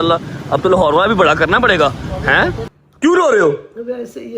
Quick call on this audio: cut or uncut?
cut